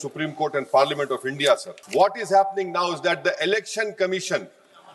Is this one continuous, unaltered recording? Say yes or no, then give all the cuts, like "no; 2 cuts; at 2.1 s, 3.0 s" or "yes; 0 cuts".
no; 1 cut; at 1.8 s